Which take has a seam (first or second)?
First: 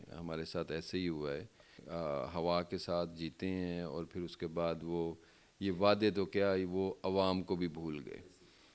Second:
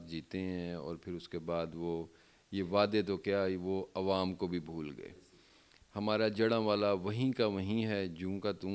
first